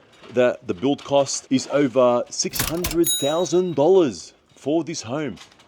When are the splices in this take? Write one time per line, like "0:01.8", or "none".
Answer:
0:01.4